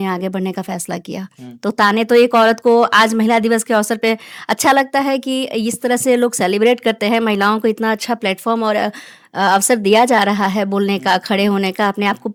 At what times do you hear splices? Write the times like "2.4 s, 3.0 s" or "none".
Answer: none